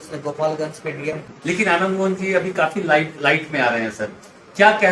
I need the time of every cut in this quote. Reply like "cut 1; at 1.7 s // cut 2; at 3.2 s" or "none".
cut 1; at 1.2 s